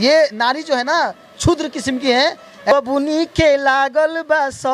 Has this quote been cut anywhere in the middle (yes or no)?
yes